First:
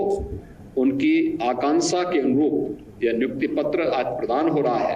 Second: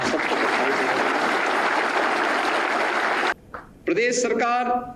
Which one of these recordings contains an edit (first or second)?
second